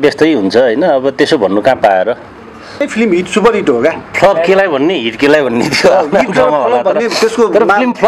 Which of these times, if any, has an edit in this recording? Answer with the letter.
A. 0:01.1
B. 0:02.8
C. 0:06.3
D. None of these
B